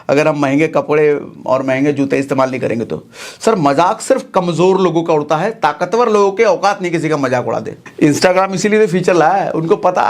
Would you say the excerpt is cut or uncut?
cut